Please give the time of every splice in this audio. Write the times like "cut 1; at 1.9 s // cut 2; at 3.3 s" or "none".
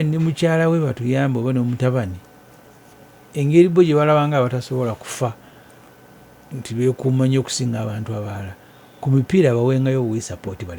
none